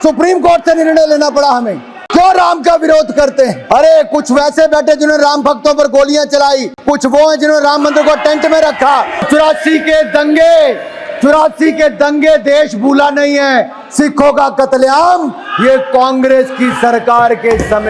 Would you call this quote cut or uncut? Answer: cut